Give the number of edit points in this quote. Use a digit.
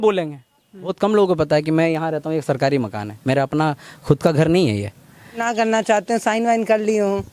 2